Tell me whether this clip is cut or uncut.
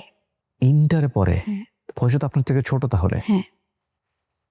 uncut